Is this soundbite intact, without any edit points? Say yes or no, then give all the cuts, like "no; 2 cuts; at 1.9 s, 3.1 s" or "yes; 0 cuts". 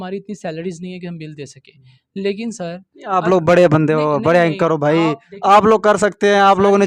yes; 0 cuts